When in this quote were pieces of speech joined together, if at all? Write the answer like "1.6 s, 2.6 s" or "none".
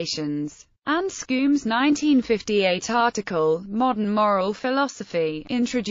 none